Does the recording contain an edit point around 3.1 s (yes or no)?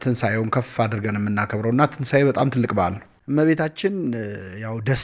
yes